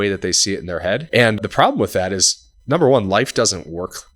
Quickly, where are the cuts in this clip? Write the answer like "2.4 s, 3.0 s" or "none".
1.0 s